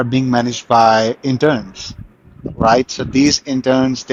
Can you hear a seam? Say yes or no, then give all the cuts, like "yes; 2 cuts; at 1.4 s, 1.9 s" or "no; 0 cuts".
no; 0 cuts